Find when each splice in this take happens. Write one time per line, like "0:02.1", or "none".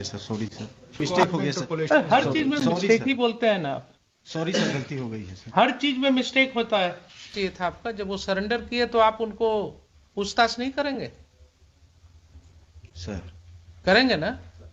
0:01.0
0:07.3